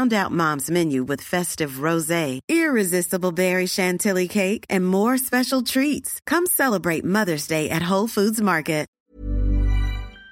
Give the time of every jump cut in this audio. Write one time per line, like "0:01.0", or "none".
0:09.0